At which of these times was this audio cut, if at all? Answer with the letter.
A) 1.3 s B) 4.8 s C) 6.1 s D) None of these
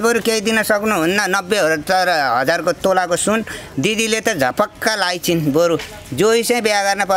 D